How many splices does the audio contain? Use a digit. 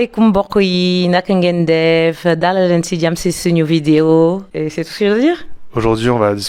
0